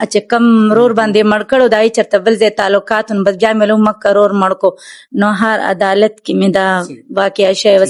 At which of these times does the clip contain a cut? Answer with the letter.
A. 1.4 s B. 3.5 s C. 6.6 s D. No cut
D